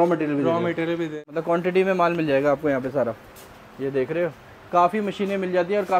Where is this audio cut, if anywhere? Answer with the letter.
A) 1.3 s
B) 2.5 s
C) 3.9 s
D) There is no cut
A